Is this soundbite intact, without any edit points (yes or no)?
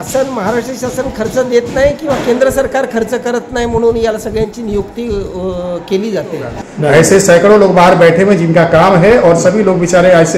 no